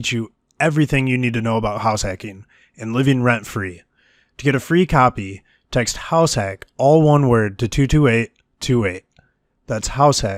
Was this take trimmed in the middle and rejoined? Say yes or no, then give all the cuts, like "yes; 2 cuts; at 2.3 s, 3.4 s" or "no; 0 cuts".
no; 0 cuts